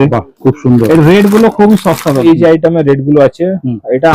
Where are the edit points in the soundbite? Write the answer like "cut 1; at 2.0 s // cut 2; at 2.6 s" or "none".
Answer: cut 1; at 2.2 s